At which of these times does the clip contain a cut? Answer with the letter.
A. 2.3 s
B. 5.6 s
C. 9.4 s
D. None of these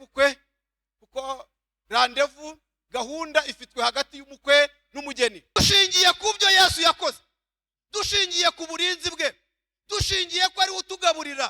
B